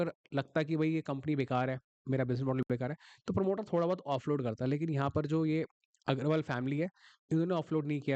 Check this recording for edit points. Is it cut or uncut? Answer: uncut